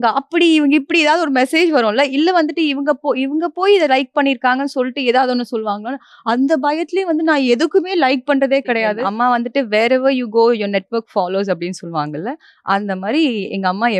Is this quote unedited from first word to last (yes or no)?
no